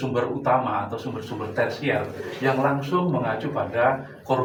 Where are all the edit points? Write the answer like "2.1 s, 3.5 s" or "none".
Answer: none